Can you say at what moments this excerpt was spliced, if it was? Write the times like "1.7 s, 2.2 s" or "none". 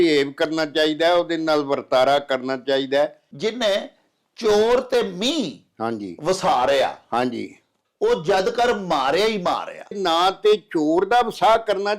3.2 s, 10.0 s